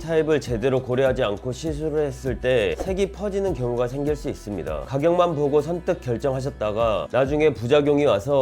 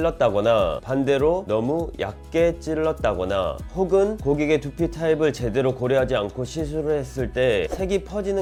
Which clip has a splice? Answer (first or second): first